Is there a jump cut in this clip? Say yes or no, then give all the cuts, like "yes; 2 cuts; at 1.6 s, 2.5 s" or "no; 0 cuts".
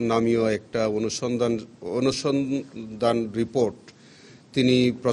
no; 0 cuts